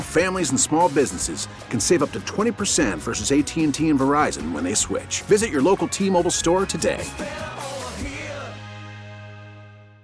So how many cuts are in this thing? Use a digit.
0